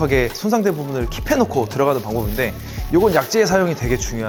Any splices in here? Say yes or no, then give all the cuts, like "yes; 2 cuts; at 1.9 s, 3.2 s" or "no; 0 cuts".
no; 0 cuts